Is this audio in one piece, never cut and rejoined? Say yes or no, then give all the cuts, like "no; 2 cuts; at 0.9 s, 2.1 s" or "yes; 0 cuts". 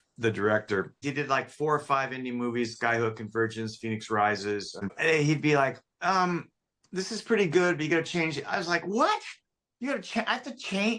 no; 2 cuts; at 1.0 s, 4.8 s